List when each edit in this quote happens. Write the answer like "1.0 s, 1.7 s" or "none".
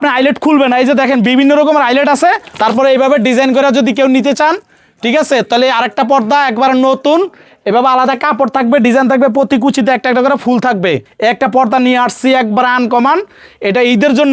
2.5 s, 11.1 s